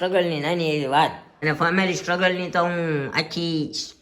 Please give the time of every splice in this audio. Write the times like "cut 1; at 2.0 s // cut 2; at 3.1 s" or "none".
cut 1; at 1.3 s